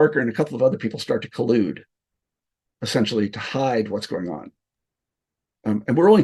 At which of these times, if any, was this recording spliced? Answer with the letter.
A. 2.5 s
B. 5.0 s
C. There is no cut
C